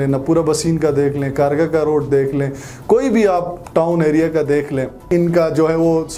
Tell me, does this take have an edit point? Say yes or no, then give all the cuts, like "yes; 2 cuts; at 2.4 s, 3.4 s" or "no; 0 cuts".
no; 0 cuts